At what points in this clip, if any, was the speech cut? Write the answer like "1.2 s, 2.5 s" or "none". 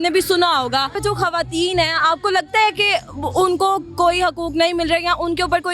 0.9 s